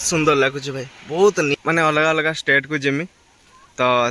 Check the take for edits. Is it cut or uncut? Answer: cut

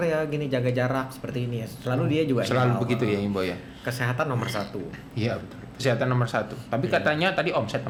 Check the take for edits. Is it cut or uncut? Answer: uncut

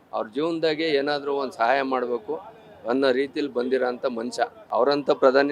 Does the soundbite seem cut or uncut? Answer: cut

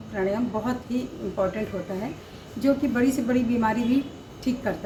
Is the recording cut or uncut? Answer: uncut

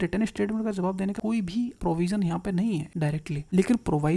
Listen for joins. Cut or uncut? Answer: cut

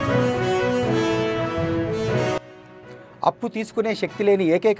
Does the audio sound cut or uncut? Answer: cut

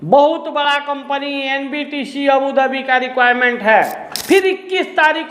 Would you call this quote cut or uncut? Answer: cut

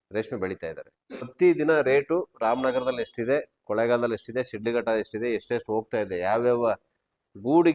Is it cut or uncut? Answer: cut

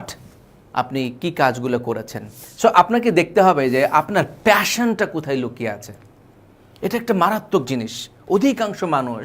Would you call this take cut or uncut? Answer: cut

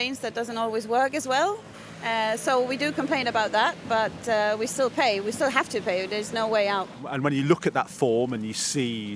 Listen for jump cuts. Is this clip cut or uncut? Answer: uncut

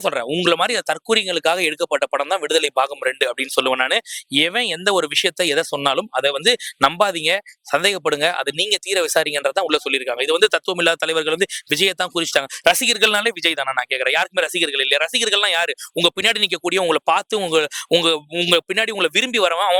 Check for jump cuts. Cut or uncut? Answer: uncut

